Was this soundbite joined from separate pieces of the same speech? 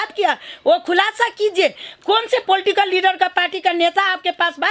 no; 0 cuts

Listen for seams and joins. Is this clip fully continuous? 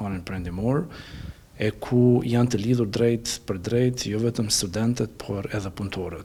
yes; 0 cuts

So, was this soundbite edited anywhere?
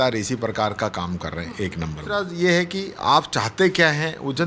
yes; 1 cut; at 2.3 s

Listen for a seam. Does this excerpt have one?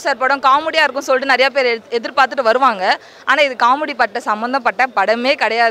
no; 0 cuts

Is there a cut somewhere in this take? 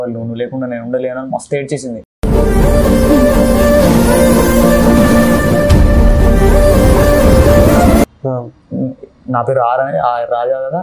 no; 0 cuts

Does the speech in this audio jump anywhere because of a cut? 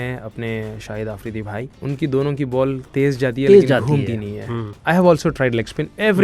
yes; 2 cuts; at 1.7 s, 4.7 s

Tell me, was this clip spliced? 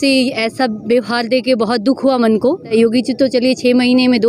yes; 1 cut; at 2.7 s

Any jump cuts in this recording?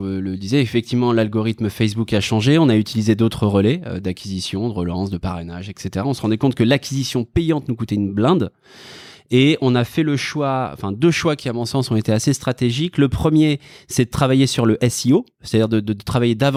no; 0 cuts

